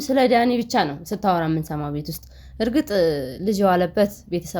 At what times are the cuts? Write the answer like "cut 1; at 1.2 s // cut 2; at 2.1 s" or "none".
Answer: none